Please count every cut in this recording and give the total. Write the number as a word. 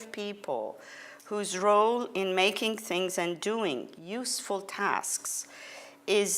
one